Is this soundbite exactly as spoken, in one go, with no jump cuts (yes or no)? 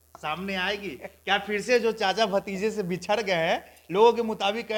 yes